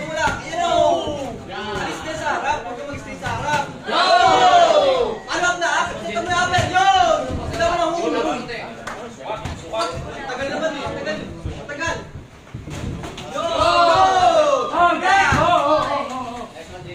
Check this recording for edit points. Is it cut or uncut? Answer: uncut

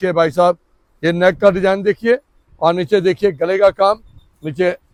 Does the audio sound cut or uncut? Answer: uncut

